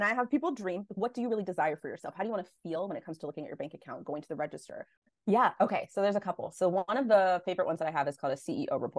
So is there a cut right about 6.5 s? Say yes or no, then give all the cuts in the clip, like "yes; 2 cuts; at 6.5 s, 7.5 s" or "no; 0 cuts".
no; 1 cut; at 5.0 s